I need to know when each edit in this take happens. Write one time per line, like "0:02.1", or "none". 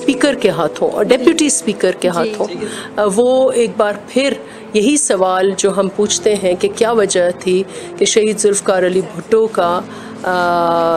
none